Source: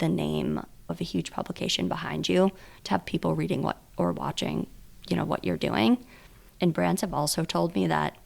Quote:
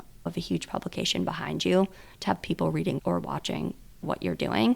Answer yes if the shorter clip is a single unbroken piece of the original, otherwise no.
no